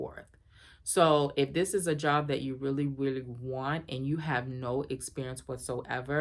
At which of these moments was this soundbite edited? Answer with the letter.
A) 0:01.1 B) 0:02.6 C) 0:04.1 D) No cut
D